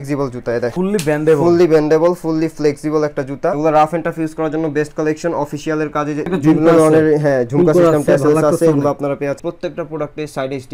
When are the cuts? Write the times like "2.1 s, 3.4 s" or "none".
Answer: 0.7 s, 3.6 s, 6.3 s, 9.4 s